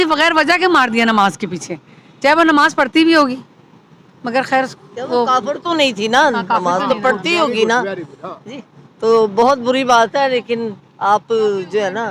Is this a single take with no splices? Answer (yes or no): yes